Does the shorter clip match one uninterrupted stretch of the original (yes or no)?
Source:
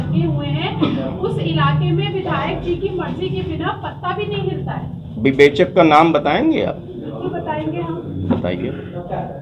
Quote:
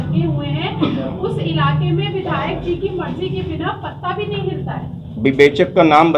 yes